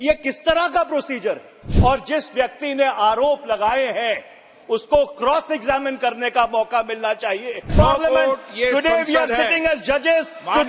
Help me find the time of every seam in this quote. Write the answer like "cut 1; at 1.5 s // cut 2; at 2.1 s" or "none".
cut 1; at 1.6 s // cut 2; at 7.7 s